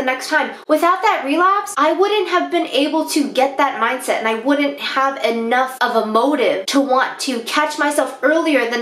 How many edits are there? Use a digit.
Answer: 2